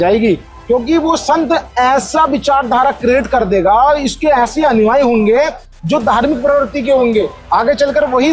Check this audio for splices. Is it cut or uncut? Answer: uncut